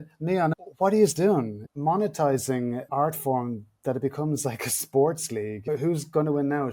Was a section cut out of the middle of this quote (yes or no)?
yes